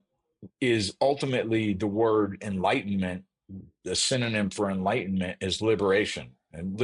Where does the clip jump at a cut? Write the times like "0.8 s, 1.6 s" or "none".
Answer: none